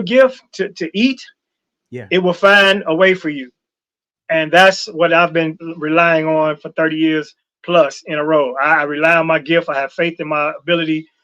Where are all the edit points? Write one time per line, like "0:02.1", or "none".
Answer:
none